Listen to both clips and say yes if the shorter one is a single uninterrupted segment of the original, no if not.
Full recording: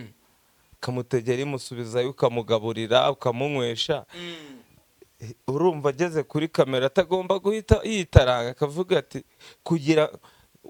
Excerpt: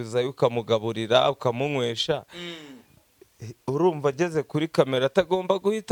yes